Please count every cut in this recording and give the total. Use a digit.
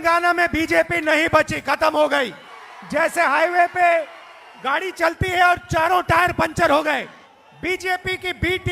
2